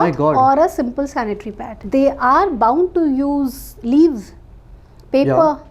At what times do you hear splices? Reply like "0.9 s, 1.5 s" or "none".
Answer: 1.8 s